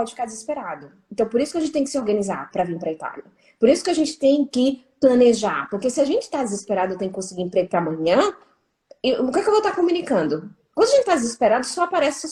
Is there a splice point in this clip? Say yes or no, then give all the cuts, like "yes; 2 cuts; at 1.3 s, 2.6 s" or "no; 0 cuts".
no; 0 cuts